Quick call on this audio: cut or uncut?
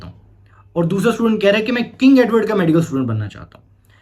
uncut